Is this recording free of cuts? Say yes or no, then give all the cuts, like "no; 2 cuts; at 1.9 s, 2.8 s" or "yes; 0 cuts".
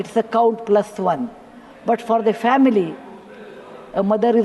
yes; 0 cuts